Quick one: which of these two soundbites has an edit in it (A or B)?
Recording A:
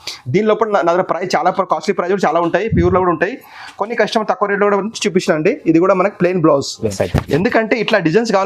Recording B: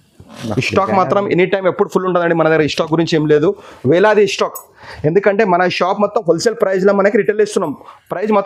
A